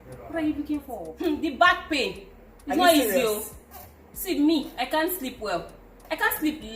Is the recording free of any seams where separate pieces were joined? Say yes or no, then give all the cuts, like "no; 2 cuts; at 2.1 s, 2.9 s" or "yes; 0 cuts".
no; 1 cut; at 1.0 s